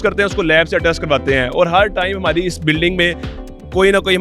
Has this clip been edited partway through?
no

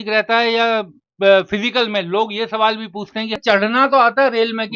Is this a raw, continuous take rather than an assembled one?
no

